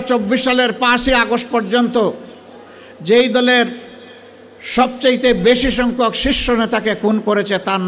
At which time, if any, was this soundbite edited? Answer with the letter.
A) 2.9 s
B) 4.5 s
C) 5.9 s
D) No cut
D